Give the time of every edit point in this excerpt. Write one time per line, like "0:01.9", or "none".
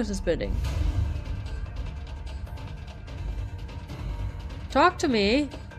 none